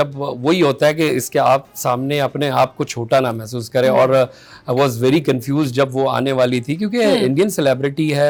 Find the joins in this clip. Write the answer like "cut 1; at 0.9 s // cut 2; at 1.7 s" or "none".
none